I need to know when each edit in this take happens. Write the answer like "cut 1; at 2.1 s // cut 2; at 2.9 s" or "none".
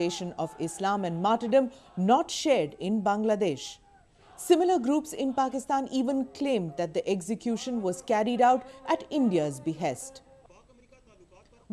none